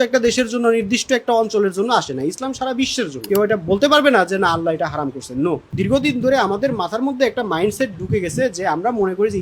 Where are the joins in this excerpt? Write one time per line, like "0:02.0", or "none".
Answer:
0:03.2
0:05.7